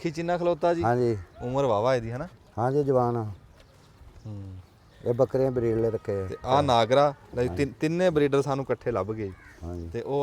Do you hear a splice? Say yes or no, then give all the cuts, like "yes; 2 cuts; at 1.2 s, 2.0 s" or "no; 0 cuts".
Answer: no; 0 cuts